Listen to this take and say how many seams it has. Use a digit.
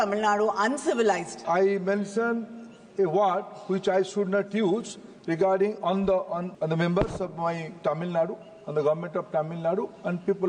2